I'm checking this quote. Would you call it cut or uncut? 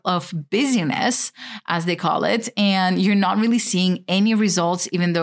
uncut